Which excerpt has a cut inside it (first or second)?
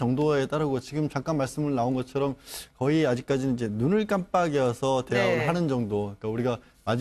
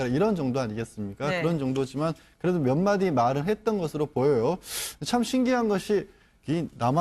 first